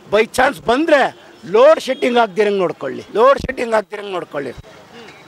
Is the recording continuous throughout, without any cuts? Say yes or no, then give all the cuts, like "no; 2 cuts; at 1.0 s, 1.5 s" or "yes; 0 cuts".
yes; 0 cuts